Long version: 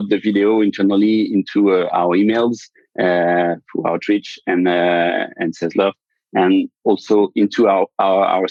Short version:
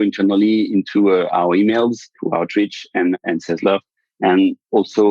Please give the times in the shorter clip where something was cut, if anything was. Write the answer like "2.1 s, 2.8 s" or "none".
2.1 s, 3.2 s